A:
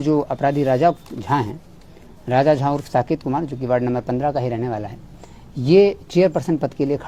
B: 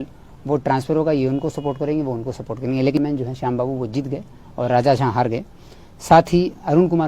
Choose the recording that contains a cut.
B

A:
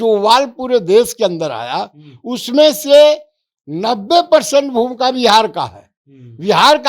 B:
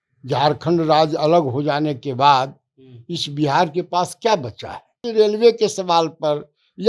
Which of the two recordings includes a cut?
B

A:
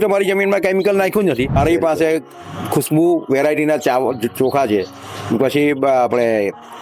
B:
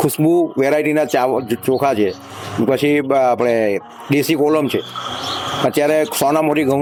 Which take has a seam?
A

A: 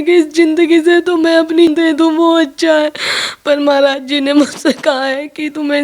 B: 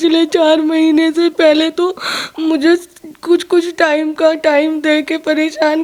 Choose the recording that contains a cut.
A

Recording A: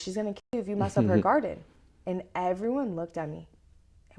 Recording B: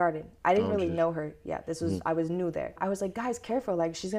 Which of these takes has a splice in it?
B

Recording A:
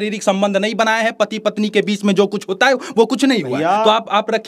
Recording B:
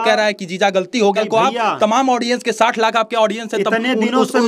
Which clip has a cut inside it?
B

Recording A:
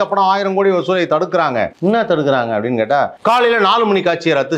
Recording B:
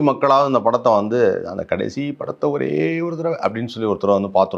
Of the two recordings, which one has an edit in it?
A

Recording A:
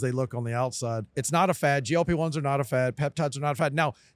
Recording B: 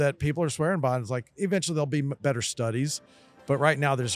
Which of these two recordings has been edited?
A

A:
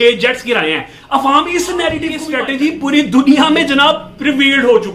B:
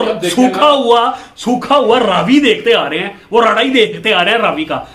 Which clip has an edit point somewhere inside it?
A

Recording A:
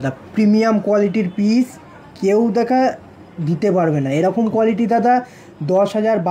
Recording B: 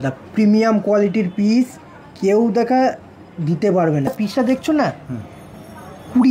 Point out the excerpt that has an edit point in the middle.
B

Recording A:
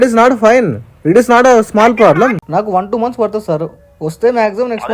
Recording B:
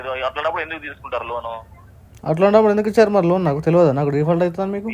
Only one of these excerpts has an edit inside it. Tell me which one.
A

